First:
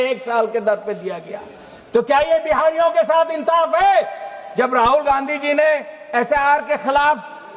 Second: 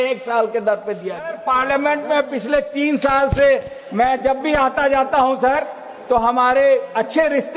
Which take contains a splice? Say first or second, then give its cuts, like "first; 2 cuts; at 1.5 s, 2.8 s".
second; 1 cut; at 1.4 s